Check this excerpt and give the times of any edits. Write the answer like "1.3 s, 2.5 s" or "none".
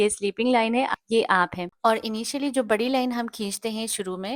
none